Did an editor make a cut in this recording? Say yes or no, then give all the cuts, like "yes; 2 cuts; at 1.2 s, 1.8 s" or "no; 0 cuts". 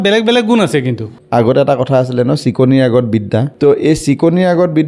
yes; 2 cuts; at 1.1 s, 3.5 s